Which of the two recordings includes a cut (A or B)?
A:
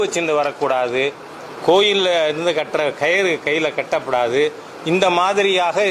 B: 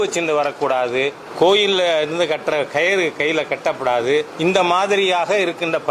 B